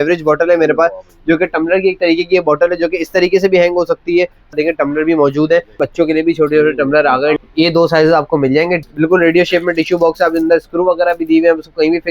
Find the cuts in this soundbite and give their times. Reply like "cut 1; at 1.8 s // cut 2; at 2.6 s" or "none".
cut 1; at 4.5 s // cut 2; at 5.8 s // cut 3; at 7.4 s // cut 4; at 8.8 s